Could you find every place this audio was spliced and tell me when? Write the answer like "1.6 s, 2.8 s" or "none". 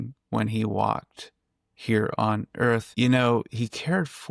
2.9 s